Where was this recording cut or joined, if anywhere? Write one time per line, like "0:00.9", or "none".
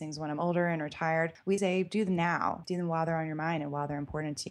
0:01.4
0:02.6